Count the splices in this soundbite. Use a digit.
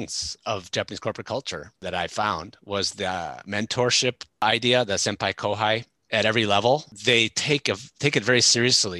1